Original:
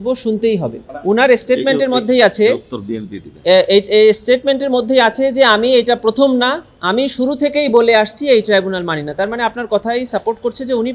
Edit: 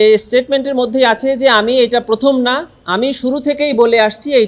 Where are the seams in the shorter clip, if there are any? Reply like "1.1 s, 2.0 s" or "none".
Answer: none